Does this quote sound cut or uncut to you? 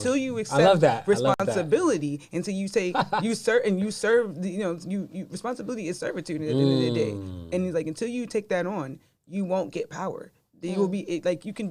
uncut